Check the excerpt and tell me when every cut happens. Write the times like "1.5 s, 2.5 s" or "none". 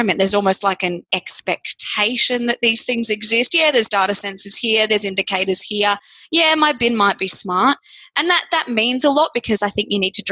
none